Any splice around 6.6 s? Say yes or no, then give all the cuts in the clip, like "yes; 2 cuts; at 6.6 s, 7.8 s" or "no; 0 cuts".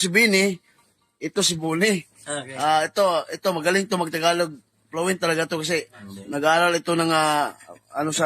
no; 1 cut; at 3.1 s